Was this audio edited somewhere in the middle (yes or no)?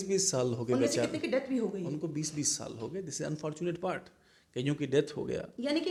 no